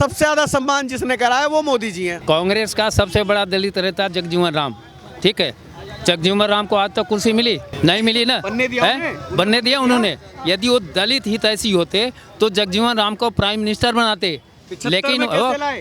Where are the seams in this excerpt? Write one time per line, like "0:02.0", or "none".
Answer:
0:02.2
0:07.7

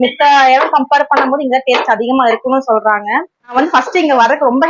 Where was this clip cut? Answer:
0:03.5

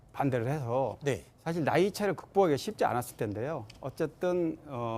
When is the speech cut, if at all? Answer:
0:02.7

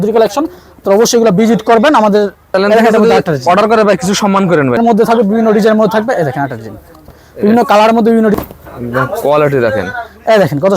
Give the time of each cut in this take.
0:02.4
0:04.8
0:08.3

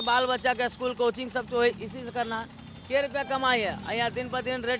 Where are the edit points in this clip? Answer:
none

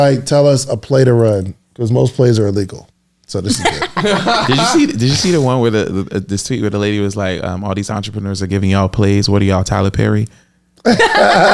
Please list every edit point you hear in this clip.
none

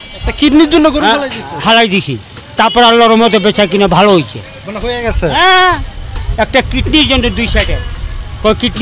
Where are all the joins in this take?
none

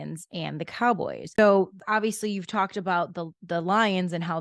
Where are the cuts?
0:01.4

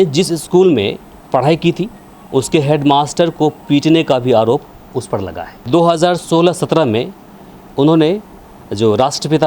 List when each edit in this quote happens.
0:05.6

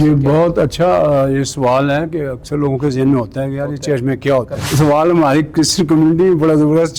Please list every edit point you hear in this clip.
0:04.7

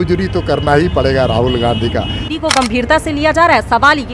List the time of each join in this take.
0:02.2

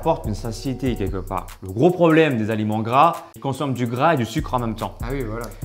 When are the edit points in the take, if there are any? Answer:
0:01.6
0:03.3

